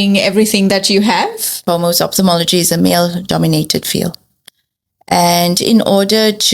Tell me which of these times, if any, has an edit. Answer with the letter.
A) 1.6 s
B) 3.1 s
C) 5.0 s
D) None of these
A